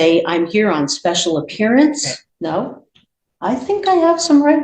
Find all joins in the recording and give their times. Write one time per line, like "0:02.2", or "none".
0:02.2